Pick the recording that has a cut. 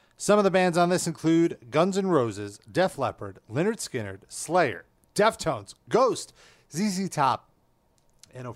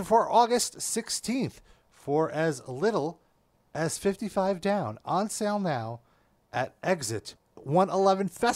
second; 1 cut; at 7.6 s

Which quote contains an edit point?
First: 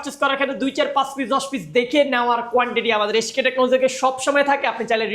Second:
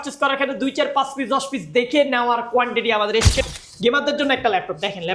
second; 1 cut; at 3.4 s

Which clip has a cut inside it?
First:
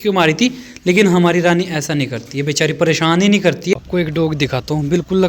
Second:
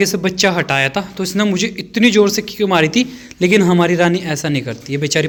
first; 1 cut; at 3.7 s

